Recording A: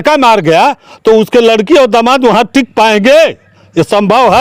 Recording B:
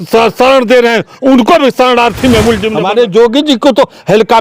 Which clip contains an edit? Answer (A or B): B